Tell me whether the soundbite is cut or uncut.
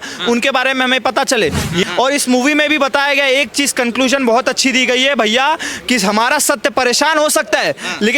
cut